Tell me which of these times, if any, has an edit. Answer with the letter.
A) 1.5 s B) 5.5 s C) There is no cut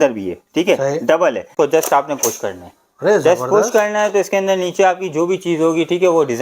A